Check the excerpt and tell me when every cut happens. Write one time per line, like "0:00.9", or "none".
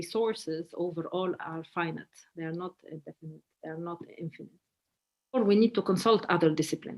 0:05.4

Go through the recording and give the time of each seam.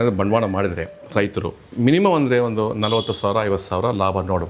0:01.7

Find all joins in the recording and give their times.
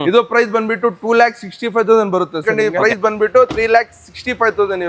0:02.5

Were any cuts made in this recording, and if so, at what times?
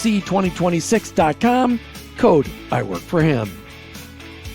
0:03.6

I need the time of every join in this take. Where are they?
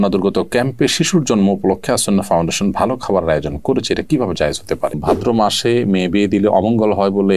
0:05.0

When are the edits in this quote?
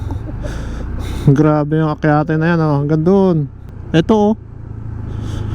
0:03.8

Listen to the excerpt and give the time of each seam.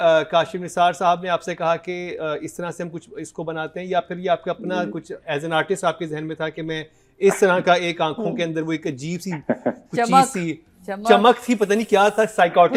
none

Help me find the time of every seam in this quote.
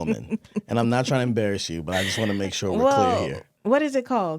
0:03.4

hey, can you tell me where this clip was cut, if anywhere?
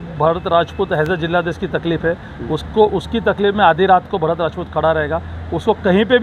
none

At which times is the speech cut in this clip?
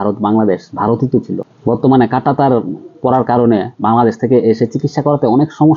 0:01.4

